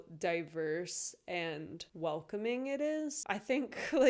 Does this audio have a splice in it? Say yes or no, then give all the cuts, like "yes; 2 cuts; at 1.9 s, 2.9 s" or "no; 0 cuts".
yes; 2 cuts; at 1.8 s, 3.2 s